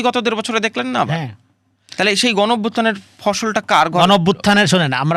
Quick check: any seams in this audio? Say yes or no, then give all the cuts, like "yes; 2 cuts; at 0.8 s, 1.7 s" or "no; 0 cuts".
no; 0 cuts